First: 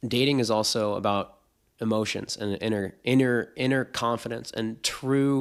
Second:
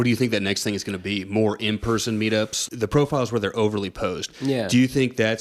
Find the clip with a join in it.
second; 1 cut; at 2.6 s

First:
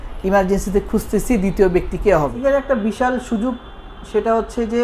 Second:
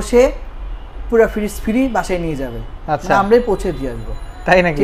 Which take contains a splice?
first; 1 cut; at 2.3 s

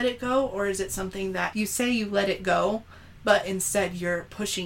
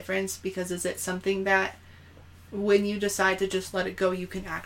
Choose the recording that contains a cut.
first; 1 cut; at 1.5 s

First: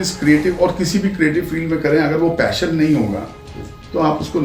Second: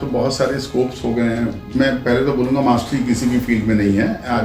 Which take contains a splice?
second; 1 cut; at 1.7 s

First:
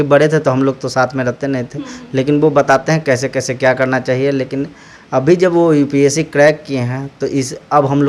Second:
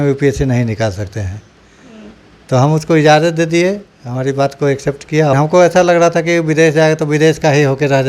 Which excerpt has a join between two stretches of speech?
second; 1 cut; at 5.3 s

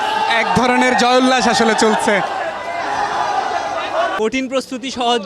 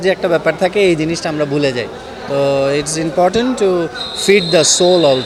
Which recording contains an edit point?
first; 1 cut; at 4.2 s

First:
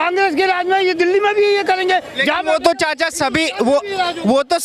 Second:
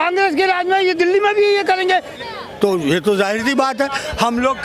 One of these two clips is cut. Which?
second; 1 cut; at 2.1 s

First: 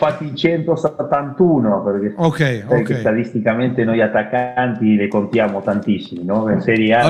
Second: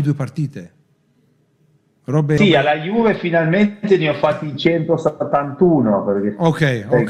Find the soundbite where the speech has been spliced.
second; 1 cut; at 2.4 s

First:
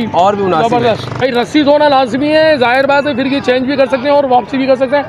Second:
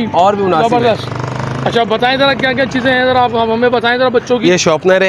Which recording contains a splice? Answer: first; 1 cut; at 1.2 s

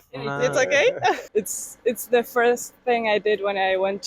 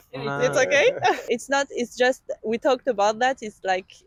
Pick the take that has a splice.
first; 1 cut; at 1.2 s

